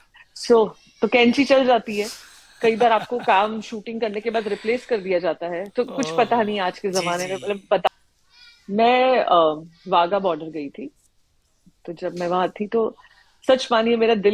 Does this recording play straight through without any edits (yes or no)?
no